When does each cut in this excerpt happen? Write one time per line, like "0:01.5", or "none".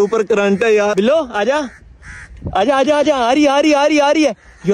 0:00.9